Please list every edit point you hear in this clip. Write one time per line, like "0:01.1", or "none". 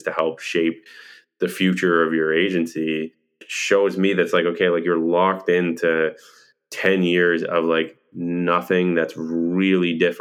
0:03.5